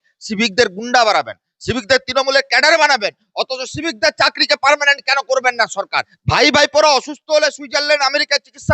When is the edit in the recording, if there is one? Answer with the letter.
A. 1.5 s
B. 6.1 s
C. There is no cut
B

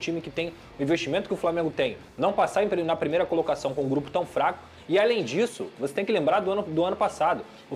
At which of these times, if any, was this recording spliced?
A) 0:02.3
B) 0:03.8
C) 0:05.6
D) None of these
D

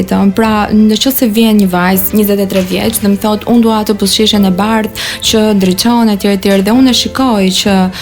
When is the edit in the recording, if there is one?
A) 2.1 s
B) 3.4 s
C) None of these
A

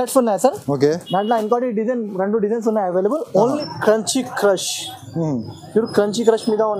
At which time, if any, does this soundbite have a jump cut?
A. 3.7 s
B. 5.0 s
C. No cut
A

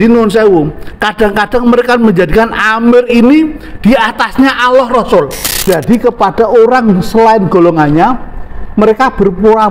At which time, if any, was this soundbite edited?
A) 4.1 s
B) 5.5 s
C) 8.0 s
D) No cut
B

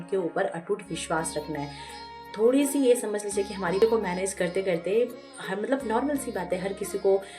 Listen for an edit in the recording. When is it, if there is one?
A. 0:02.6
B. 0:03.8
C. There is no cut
B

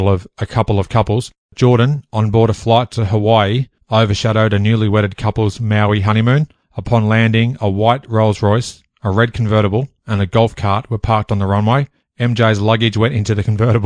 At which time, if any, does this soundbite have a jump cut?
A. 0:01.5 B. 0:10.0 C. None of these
A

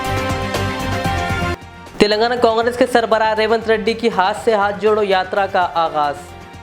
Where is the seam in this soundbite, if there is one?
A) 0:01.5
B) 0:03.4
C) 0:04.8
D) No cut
A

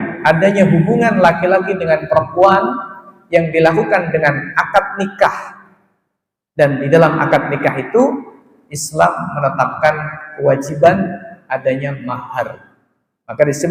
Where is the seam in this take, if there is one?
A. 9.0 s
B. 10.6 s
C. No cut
C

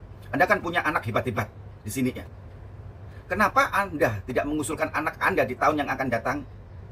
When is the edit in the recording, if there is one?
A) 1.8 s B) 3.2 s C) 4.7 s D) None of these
D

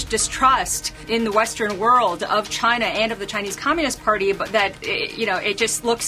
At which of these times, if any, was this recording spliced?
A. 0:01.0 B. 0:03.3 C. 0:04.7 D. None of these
A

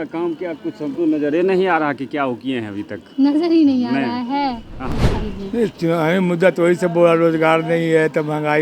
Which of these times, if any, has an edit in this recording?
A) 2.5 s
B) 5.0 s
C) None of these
B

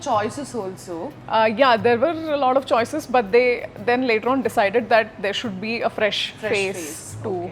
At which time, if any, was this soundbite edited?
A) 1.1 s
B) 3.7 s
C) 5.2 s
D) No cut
A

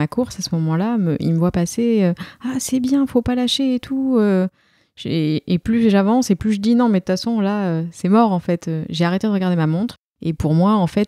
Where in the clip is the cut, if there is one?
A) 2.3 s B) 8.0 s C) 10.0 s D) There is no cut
C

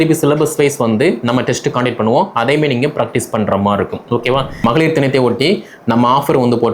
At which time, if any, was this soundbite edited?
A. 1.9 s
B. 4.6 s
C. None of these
B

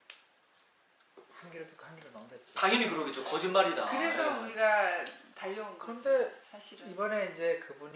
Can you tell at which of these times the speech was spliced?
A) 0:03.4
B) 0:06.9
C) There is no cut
C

